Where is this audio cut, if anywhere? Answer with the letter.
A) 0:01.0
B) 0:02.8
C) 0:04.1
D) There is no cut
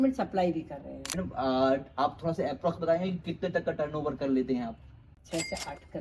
A